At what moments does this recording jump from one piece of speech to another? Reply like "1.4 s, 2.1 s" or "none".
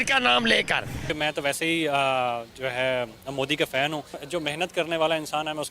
1.0 s, 4.2 s

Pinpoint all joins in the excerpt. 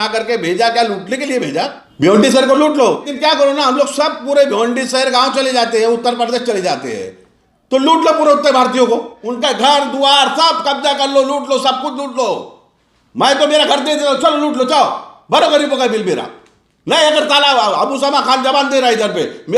1.8 s, 3.1 s, 9.1 s

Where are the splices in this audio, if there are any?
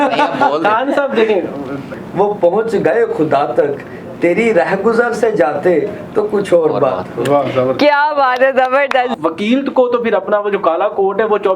1.9 s, 9.1 s

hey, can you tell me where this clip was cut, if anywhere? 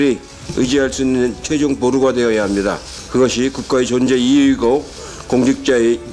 2.9 s

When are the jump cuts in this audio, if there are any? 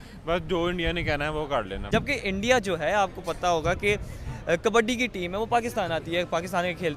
1.8 s

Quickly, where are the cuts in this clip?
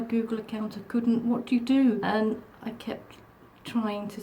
2.0 s

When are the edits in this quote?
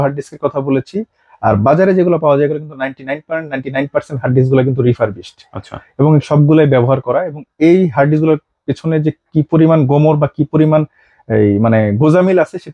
none

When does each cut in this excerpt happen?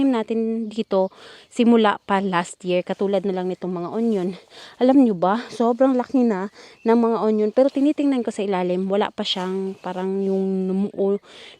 none

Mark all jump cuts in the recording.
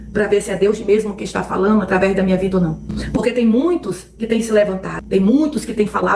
2.9 s

